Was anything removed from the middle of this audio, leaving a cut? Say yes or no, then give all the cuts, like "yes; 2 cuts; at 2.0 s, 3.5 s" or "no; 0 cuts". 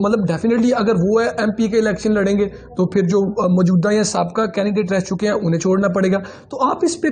no; 0 cuts